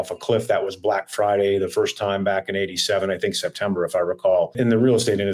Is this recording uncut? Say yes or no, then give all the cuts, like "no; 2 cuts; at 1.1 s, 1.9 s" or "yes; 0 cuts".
yes; 0 cuts